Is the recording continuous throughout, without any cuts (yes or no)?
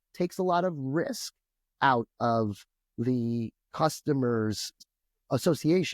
no